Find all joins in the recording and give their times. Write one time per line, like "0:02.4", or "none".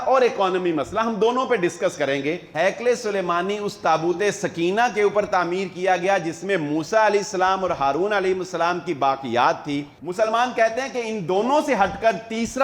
0:02.5
0:10.0